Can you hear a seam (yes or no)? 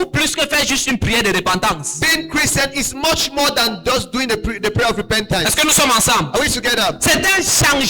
no